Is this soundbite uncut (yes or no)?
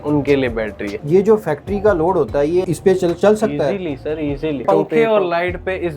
no